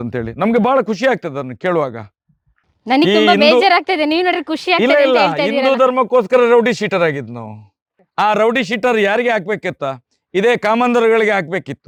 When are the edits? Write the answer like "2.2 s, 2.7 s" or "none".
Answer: none